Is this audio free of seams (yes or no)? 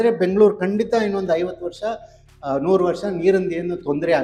yes